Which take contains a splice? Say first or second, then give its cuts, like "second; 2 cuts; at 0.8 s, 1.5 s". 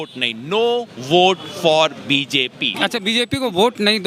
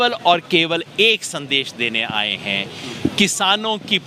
first; 1 cut; at 2.7 s